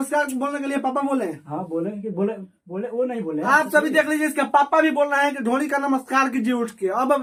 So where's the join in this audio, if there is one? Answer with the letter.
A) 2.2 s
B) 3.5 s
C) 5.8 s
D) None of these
D